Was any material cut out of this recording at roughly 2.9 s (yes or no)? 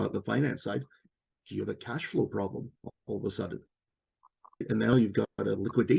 no